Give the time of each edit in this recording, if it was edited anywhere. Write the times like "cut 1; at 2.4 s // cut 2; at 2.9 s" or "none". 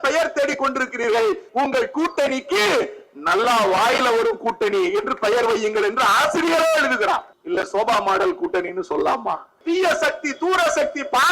cut 1; at 1.4 s // cut 2; at 7.3 s // cut 3; at 9.6 s